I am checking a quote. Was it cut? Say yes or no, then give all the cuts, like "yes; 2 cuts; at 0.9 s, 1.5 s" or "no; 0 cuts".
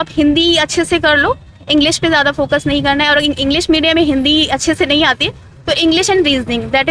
no; 0 cuts